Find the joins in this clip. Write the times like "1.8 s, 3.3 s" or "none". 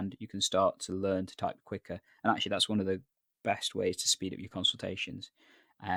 none